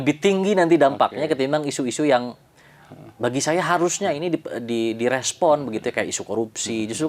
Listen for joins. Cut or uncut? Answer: uncut